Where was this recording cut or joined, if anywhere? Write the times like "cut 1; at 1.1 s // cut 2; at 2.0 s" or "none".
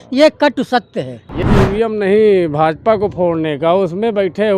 cut 1; at 1.4 s